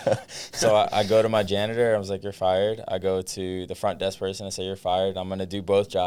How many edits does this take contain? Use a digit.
0